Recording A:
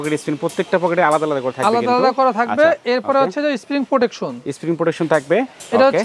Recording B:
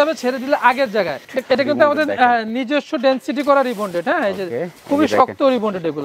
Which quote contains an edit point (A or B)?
B